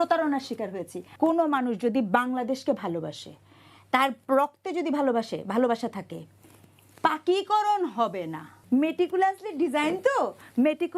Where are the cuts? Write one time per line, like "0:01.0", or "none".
0:01.0
0:08.6